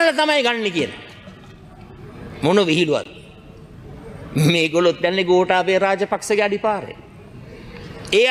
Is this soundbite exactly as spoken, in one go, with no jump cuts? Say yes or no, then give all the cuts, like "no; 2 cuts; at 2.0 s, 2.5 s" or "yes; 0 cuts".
yes; 0 cuts